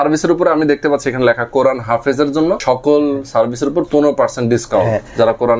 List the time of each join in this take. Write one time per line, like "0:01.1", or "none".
0:02.6